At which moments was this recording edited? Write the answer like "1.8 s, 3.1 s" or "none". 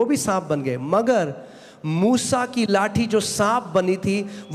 none